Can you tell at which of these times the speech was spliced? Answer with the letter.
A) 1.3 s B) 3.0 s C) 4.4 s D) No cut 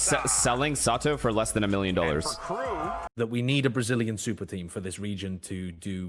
B